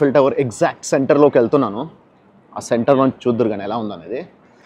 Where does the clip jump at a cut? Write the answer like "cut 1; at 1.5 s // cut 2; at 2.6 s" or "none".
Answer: none